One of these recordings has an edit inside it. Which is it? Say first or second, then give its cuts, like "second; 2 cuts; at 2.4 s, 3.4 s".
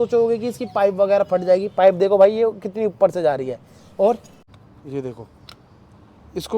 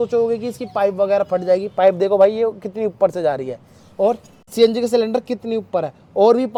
first; 1 cut; at 4.4 s